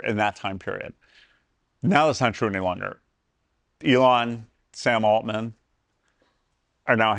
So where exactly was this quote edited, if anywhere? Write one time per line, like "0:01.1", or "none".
none